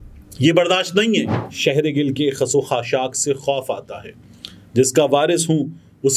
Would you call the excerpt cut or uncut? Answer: cut